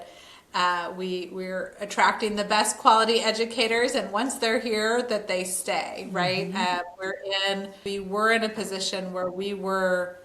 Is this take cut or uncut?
cut